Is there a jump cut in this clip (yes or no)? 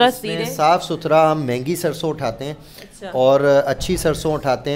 no